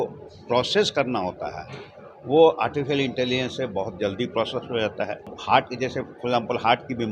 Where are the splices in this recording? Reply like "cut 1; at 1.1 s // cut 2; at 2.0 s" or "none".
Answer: cut 1; at 5.4 s